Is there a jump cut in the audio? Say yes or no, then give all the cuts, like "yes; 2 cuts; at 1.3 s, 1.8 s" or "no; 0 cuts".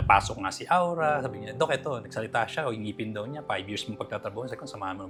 no; 0 cuts